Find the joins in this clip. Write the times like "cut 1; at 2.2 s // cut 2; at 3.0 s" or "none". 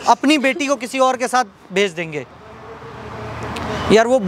none